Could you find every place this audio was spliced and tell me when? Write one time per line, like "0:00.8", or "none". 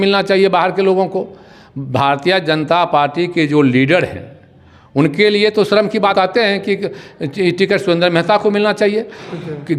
0:06.1